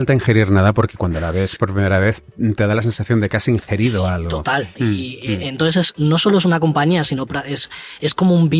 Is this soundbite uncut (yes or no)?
no